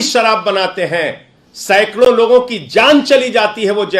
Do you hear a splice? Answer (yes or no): no